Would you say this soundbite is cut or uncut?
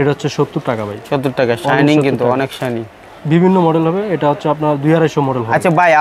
uncut